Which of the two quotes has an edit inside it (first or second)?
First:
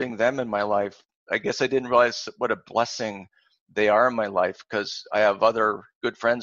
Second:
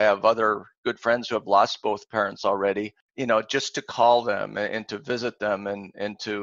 second